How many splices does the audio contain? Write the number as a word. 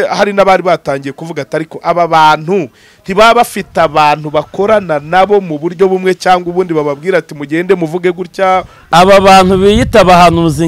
one